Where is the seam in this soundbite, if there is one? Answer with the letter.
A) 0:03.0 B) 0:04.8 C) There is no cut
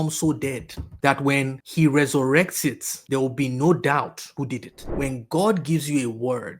B